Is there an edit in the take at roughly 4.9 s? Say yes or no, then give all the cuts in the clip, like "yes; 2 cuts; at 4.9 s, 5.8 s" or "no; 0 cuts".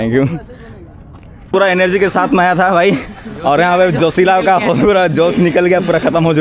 no; 1 cut; at 1.5 s